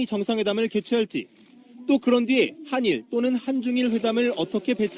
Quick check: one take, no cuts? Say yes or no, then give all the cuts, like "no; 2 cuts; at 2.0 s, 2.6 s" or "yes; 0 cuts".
no; 1 cut; at 1.7 s